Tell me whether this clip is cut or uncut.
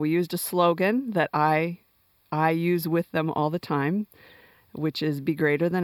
uncut